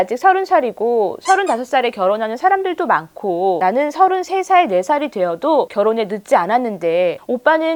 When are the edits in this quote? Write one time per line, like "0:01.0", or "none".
none